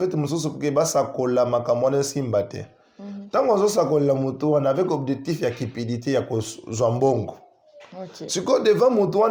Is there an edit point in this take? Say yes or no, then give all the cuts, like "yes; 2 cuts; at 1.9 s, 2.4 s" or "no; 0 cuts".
no; 0 cuts